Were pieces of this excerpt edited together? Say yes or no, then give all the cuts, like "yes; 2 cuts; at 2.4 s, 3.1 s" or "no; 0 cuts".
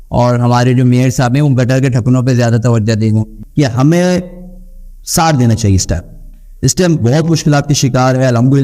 yes; 1 cut; at 3.4 s